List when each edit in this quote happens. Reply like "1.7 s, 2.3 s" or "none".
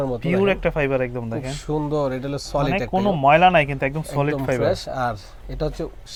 none